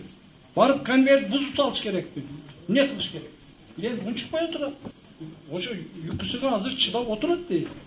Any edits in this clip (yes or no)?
yes